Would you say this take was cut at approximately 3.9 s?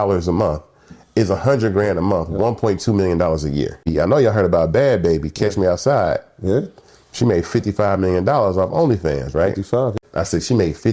yes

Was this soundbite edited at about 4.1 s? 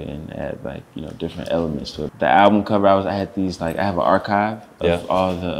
no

